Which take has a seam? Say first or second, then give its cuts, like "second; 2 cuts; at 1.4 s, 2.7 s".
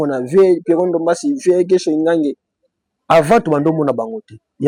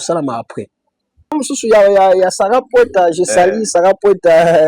second; 1 cut; at 1.4 s